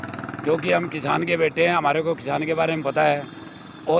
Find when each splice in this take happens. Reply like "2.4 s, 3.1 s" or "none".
none